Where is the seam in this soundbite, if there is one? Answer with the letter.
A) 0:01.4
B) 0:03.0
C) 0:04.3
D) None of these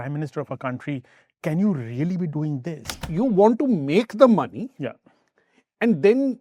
B